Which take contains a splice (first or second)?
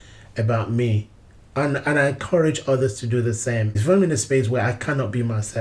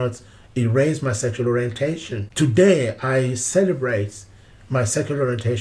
first